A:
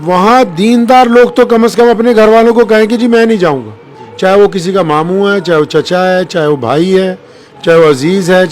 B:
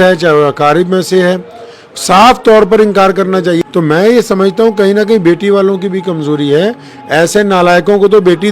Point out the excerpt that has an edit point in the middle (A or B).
B